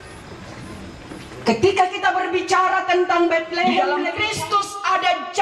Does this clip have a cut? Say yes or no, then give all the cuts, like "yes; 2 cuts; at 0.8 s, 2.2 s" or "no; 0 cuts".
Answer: yes; 1 cut; at 4.1 s